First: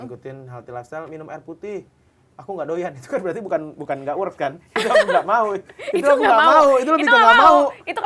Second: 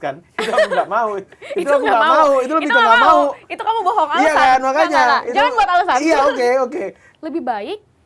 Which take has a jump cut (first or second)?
second